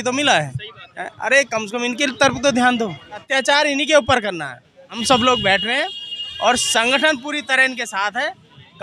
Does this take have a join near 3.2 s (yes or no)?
yes